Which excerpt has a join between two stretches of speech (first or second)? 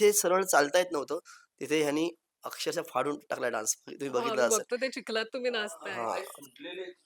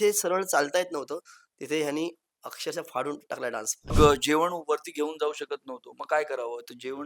second